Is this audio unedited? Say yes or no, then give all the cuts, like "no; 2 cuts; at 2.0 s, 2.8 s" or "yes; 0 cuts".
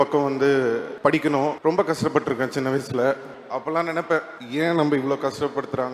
no; 4 cuts; at 0.9 s, 1.6 s, 3.3 s, 4.4 s